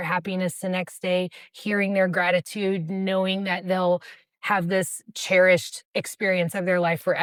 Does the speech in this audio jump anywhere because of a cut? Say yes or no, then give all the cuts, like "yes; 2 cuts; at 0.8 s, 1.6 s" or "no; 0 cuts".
no; 0 cuts